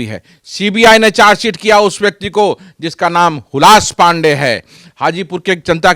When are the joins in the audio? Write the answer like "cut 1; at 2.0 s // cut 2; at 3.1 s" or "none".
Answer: cut 1; at 4.8 s